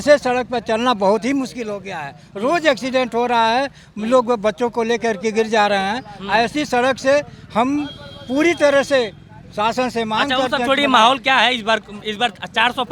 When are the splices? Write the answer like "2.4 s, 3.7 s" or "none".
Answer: none